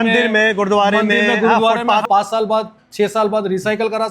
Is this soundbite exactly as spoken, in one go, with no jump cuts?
no; 1 cut; at 2.0 s

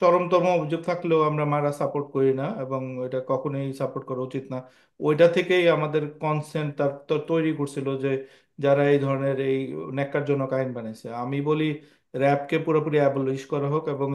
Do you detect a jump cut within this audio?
no; 0 cuts

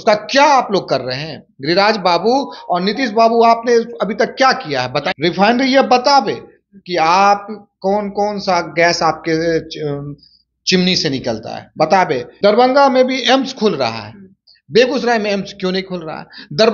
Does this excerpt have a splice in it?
yes; 2 cuts; at 5.1 s, 12.3 s

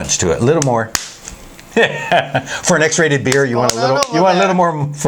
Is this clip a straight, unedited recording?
yes; 0 cuts

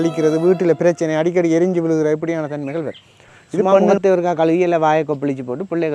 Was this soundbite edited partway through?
yes; 1 cut; at 3.9 s

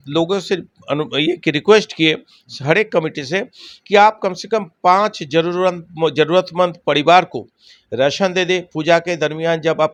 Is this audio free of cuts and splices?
yes; 0 cuts

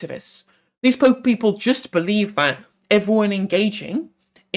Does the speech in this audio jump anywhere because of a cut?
no; 0 cuts

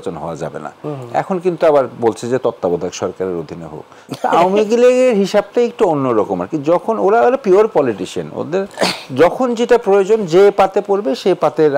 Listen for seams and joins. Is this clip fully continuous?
yes; 0 cuts

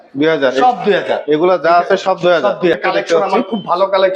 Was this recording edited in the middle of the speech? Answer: yes; 1 cut; at 2.8 s

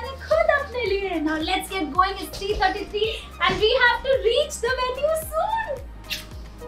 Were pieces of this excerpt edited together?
no; 0 cuts

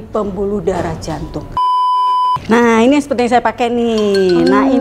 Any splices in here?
yes; 1 cut; at 1.8 s

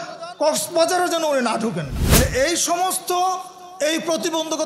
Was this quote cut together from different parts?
yes; 1 cut; at 2.0 s

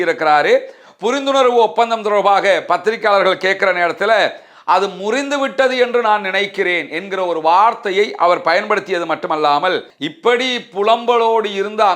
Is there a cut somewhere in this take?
yes; 1 cut; at 9.9 s

